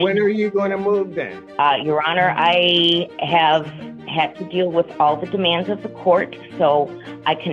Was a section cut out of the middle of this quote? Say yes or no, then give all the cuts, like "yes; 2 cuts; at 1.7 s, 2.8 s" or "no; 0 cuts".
yes; 1 cut; at 1.4 s